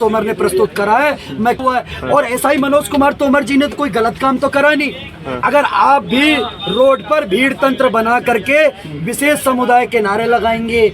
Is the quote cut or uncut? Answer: cut